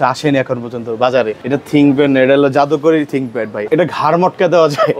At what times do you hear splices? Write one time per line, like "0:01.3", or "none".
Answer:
0:01.4
0:03.6

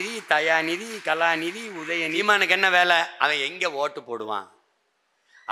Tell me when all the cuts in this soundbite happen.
0:02.2

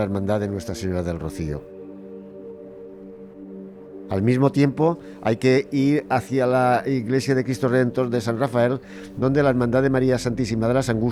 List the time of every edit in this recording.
none

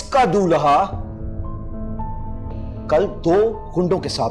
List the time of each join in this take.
none

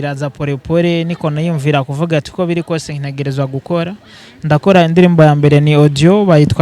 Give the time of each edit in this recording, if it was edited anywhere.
none

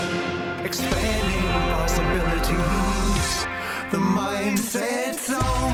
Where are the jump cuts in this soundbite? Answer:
none

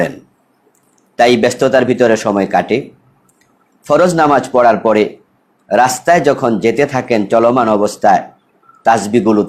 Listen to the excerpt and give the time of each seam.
none

